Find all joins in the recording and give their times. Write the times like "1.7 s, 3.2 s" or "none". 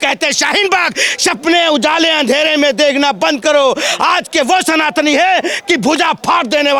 none